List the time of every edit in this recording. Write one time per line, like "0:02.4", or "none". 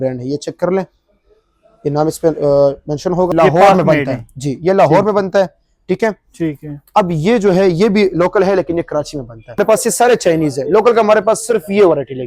0:03.3
0:09.6